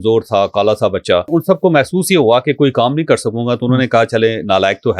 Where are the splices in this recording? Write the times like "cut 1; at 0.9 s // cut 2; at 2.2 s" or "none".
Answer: cut 1; at 1.3 s

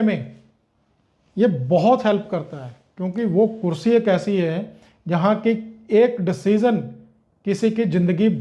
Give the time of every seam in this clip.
none

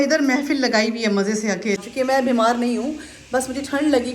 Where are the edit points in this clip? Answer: cut 1; at 1.8 s

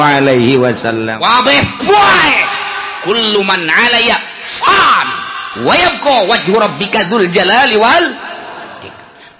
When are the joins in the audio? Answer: cut 1; at 1.1 s

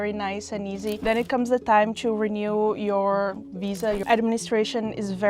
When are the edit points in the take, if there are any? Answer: cut 1; at 1.0 s // cut 2; at 4.0 s

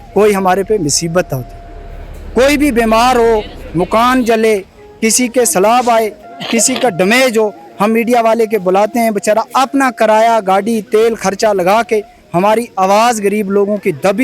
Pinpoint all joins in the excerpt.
none

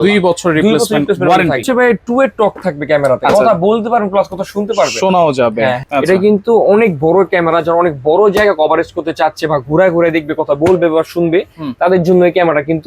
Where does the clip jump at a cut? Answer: cut 1; at 1.6 s // cut 2; at 5.8 s

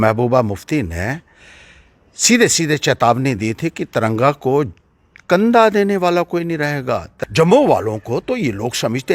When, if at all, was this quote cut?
cut 1; at 7.1 s

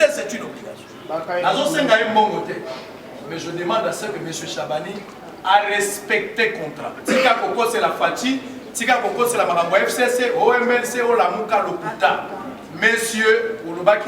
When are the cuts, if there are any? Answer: cut 1; at 6.9 s

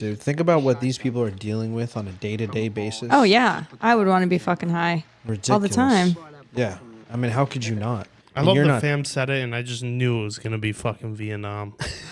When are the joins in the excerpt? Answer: none

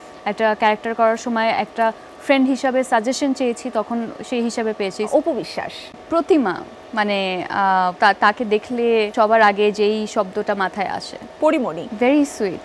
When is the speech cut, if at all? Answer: cut 1; at 5.1 s // cut 2; at 7.9 s // cut 3; at 9.1 s // cut 4; at 11.5 s

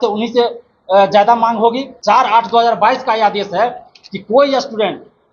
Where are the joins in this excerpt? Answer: cut 1; at 1.9 s

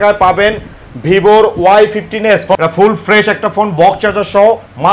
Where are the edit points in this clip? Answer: cut 1; at 2.6 s

